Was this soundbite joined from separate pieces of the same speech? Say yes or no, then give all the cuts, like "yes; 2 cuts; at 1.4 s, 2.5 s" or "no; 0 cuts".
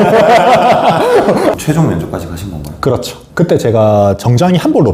yes; 1 cut; at 1.5 s